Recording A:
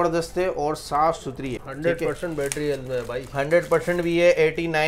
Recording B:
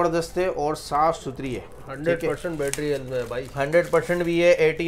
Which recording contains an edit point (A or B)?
A